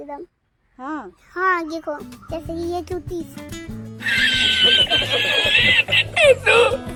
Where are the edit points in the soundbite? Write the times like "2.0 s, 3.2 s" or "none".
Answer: none